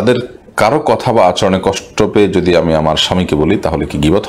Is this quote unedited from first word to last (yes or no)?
yes